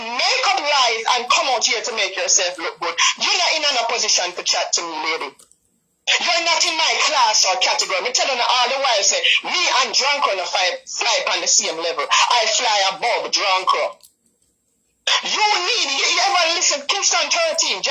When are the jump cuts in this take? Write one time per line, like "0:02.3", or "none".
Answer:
none